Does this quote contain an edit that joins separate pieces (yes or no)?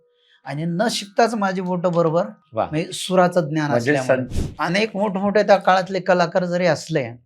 yes